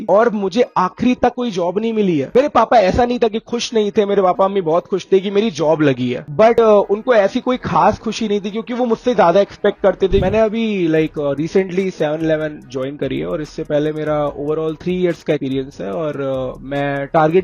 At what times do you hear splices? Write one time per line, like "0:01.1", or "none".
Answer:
0:02.3
0:10.2